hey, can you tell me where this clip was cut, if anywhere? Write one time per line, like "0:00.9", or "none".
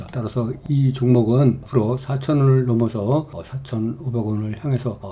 0:01.6